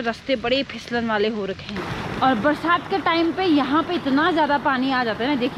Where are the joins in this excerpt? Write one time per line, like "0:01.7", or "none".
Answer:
0:01.9